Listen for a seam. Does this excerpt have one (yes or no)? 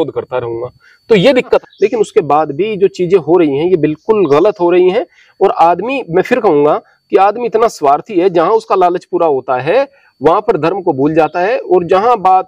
yes